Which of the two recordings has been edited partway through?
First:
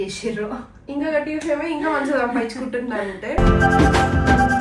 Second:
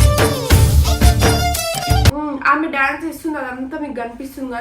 second; 1 cut; at 2.1 s

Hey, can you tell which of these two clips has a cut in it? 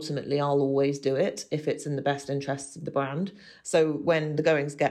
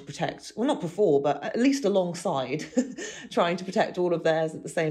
first; 1 cut; at 3.5 s

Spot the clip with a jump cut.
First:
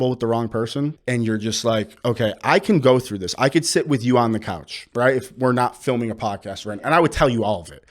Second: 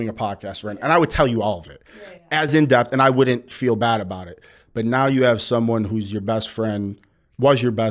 first; 1 cut; at 1.0 s

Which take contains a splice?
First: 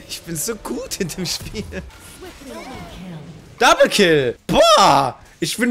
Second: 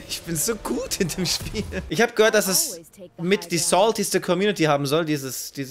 first; 2 cuts; at 1.9 s, 3.5 s

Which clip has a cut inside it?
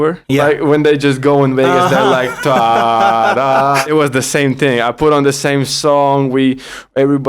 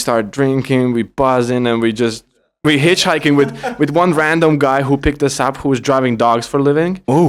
first; 1 cut; at 3.8 s

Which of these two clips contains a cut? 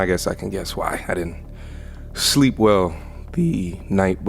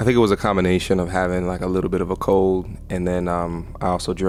first; 1 cut; at 1.4 s

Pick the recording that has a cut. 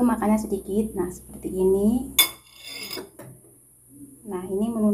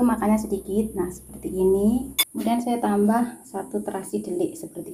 second; 1 cut; at 2.3 s

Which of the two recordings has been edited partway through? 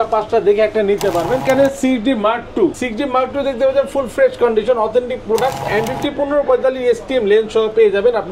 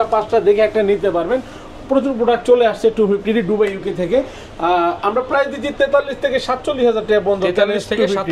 first; 3 cuts; at 1.4 s, 2.8 s, 5.7 s

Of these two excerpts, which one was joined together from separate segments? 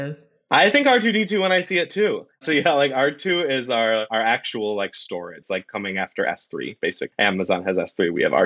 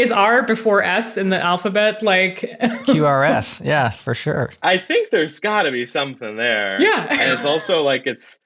first; 3 cuts; at 4.1 s, 5.4 s, 7.0 s

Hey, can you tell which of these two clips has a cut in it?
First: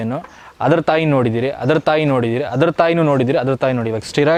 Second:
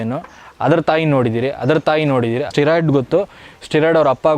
second; 1 cut; at 2.5 s

